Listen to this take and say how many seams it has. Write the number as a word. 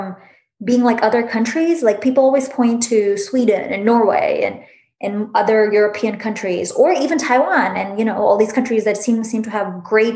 zero